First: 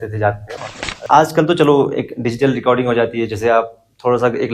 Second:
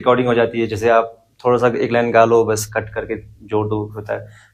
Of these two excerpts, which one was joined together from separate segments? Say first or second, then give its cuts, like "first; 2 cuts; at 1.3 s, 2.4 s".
first; 1 cut; at 1.0 s